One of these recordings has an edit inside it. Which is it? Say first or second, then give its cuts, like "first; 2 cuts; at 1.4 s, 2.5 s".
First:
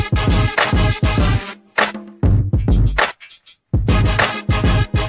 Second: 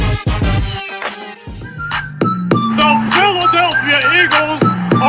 second; 1 cut; at 1.4 s